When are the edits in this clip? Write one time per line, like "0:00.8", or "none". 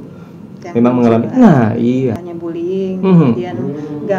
0:02.3